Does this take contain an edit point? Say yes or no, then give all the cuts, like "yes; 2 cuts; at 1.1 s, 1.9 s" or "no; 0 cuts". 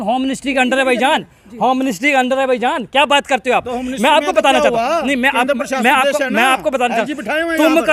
no; 0 cuts